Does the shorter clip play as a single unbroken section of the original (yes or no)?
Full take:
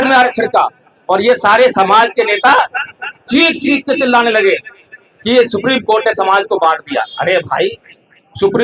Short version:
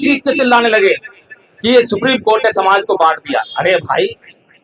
yes